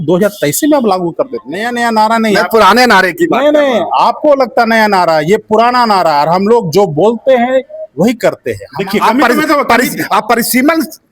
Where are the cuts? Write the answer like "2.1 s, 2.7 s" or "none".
1.7 s, 8.6 s

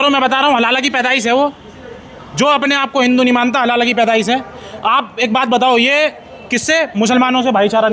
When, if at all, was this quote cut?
none

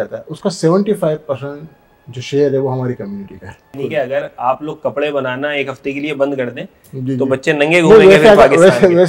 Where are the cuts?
3.8 s

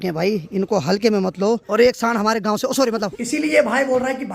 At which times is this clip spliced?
1.7 s, 3.2 s

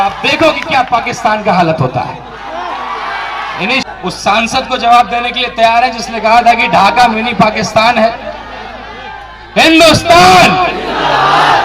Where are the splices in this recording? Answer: 3.8 s

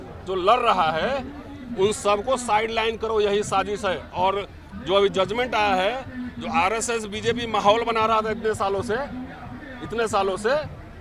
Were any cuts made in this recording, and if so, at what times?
none

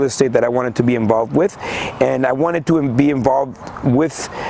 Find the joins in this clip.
none

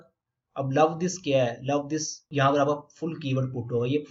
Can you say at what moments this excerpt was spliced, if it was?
2.3 s

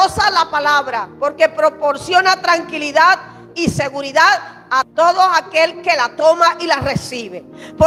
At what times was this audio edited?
none

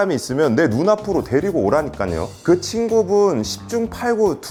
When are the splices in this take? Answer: none

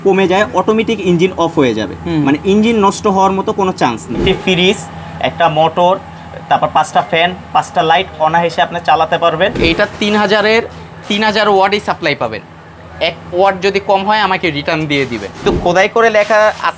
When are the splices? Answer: 4.2 s, 9.6 s, 15.4 s

